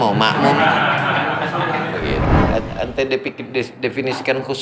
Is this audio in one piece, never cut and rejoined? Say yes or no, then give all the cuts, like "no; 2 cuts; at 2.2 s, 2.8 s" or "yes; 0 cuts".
no; 1 cut; at 2.2 s